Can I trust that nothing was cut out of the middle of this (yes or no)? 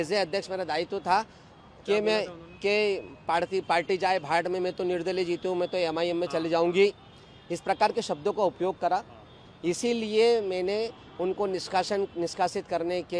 yes